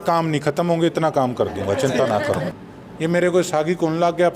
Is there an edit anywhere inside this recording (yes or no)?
yes